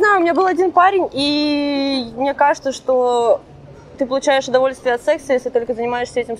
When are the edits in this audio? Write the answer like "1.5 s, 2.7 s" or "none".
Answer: none